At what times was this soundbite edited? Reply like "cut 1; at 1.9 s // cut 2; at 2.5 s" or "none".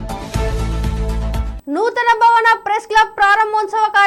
cut 1; at 1.5 s